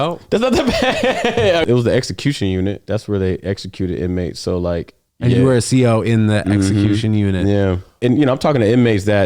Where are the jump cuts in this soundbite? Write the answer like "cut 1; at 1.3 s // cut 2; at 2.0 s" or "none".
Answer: cut 1; at 1.6 s // cut 2; at 8.0 s